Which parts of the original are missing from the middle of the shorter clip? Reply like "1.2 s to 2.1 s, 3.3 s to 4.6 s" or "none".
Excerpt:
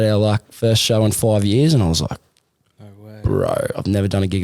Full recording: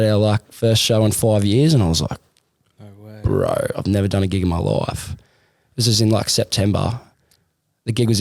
none